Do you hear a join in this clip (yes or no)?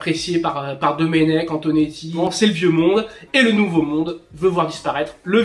yes